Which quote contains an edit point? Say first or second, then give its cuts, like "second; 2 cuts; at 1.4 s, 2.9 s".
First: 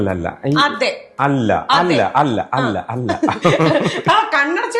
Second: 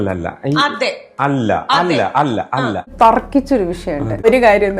second; 1 cut; at 2.9 s